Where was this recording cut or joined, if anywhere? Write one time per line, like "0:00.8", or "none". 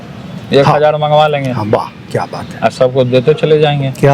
none